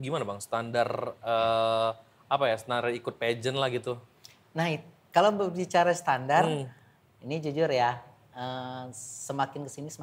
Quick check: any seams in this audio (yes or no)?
no